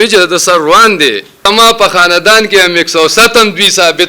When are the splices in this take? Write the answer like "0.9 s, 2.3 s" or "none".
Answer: 1.5 s

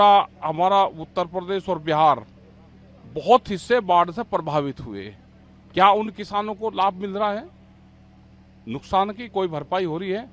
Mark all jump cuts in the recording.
none

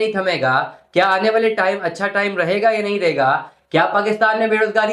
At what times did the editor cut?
none

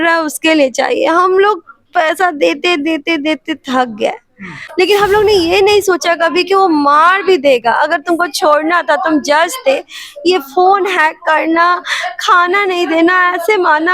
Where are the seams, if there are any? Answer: 4.6 s

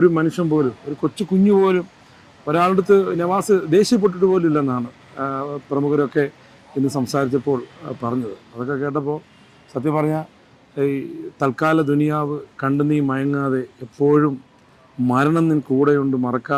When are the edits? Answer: none

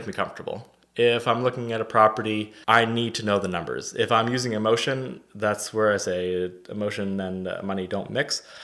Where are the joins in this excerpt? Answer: 2.5 s

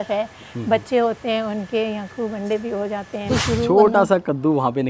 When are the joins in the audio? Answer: 3.3 s

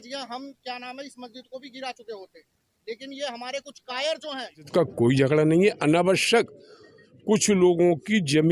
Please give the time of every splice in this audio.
4.7 s

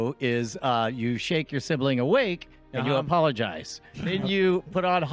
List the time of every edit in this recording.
4.1 s

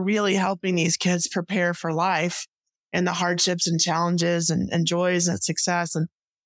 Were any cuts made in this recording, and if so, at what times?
none

